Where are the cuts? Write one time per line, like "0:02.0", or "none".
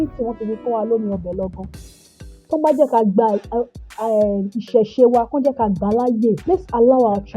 0:06.4